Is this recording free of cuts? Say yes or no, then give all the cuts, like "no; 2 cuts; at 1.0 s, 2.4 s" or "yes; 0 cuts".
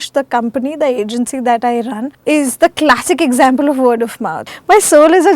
no; 2 cuts; at 2.1 s, 4.5 s